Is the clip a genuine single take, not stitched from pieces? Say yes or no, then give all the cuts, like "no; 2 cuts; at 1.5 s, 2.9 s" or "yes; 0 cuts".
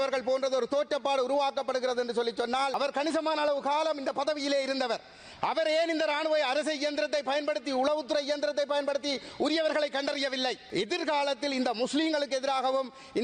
no; 2 cuts; at 2.8 s, 10.6 s